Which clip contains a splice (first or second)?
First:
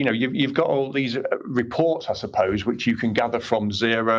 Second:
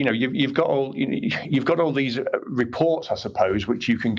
first